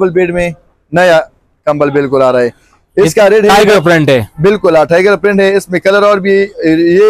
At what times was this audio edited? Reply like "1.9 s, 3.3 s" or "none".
none